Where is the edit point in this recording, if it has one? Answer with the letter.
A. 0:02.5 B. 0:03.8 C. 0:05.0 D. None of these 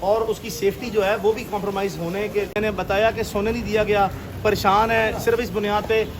A